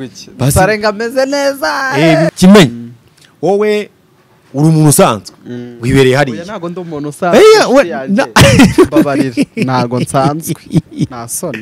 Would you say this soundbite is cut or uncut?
cut